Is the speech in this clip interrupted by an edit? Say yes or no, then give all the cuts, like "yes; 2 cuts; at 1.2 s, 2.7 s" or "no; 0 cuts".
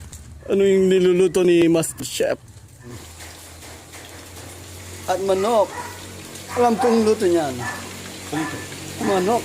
yes; 1 cut; at 2.9 s